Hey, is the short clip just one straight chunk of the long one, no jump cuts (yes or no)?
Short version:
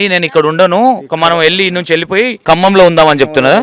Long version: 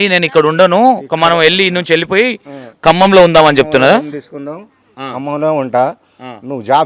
no